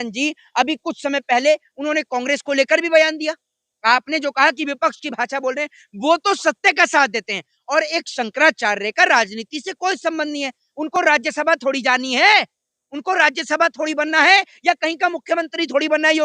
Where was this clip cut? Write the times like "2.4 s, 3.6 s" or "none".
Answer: none